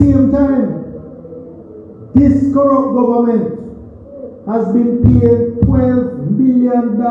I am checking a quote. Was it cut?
no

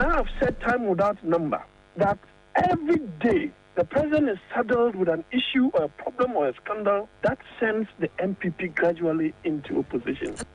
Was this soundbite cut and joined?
no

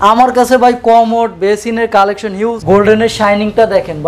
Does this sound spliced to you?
yes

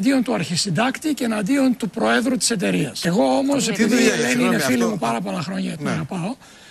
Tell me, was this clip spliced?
yes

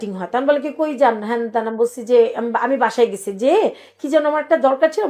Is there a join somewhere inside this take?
no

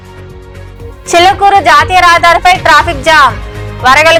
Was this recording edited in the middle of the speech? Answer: no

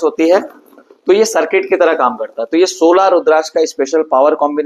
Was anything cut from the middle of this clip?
no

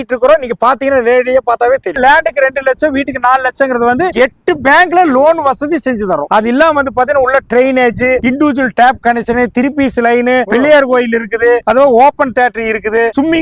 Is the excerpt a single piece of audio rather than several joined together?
yes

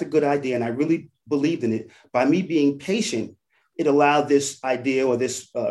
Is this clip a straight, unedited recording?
yes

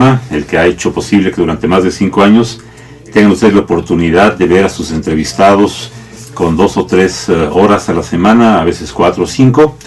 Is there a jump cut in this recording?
no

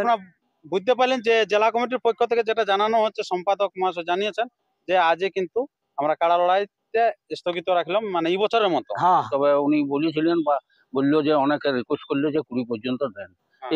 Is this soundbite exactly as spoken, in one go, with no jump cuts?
no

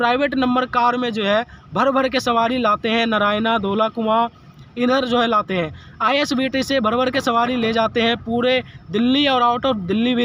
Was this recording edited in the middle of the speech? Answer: no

